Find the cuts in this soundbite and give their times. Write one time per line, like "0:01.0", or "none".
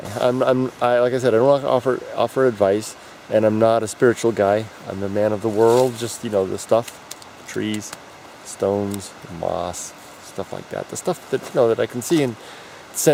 none